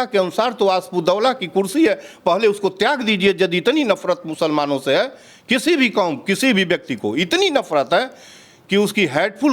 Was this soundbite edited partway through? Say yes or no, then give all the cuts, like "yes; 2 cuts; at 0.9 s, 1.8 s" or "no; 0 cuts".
no; 0 cuts